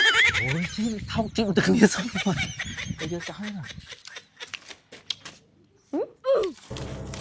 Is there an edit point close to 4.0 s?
yes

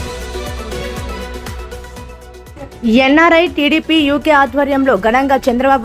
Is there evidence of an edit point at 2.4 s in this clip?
yes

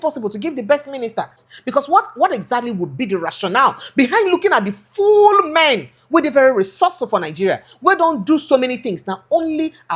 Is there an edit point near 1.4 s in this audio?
yes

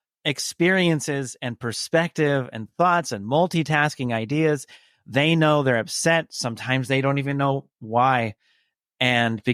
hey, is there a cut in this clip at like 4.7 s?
no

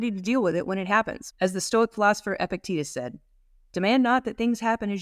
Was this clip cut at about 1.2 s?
yes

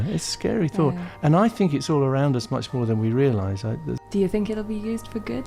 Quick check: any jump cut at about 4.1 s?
yes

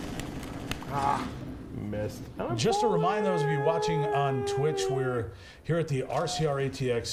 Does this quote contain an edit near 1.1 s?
no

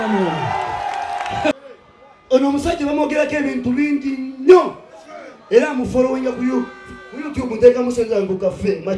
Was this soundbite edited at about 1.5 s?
yes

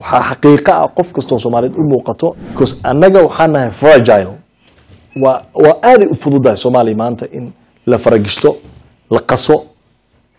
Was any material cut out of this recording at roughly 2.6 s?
yes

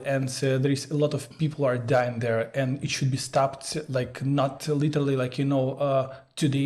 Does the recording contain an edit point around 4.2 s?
no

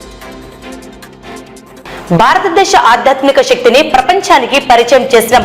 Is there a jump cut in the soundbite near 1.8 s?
yes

